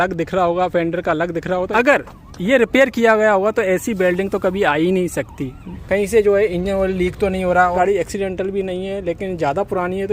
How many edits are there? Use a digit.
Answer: 3